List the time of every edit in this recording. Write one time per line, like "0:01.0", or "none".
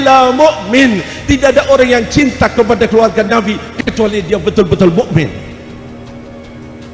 none